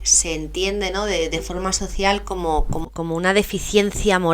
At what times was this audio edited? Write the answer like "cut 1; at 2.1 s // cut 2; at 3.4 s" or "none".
cut 1; at 2.8 s

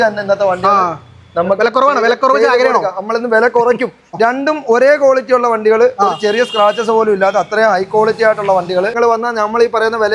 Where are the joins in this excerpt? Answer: cut 1; at 4.1 s // cut 2; at 9.0 s

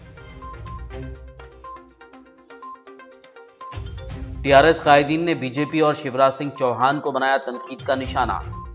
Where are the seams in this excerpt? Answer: cut 1; at 1.0 s

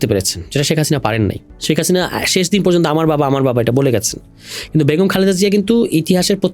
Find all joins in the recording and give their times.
cut 1; at 1.5 s

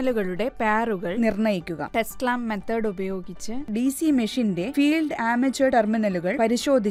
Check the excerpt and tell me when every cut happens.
none

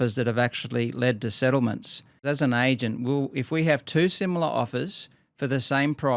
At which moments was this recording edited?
cut 1; at 2.2 s

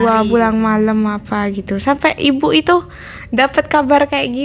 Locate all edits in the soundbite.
none

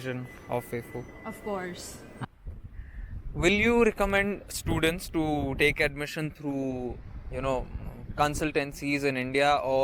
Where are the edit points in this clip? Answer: cut 1; at 2.2 s

